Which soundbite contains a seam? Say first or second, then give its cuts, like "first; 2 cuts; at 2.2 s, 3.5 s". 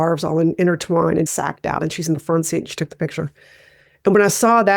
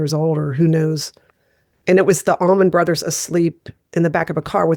first; 1 cut; at 1.3 s